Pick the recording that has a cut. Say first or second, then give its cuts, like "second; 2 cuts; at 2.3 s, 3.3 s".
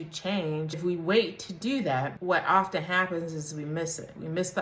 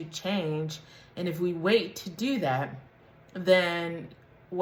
first; 2 cuts; at 0.8 s, 2.1 s